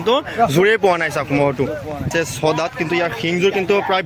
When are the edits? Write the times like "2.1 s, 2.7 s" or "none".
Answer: 2.1 s